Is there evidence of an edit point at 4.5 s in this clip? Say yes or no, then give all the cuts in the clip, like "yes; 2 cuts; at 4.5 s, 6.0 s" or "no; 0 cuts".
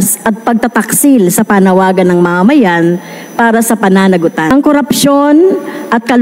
yes; 1 cut; at 4.5 s